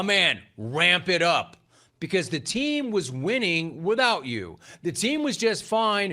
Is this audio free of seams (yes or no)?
yes